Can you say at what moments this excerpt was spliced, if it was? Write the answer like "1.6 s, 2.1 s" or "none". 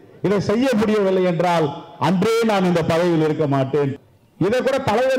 3.9 s